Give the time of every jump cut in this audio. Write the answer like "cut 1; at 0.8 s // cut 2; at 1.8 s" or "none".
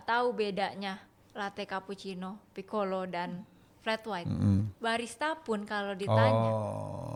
none